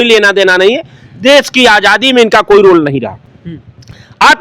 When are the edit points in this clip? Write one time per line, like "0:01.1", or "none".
none